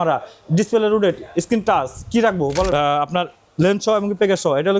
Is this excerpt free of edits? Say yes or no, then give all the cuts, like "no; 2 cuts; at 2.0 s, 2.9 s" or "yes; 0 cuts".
no; 1 cut; at 2.7 s